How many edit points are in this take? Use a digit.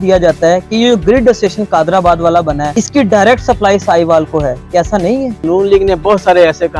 2